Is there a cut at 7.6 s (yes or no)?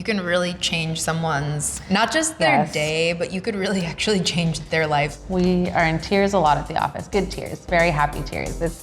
no